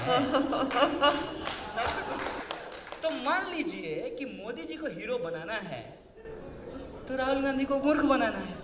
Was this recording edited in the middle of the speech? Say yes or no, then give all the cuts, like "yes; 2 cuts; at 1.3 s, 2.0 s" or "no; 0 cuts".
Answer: yes; 1 cut; at 2.4 s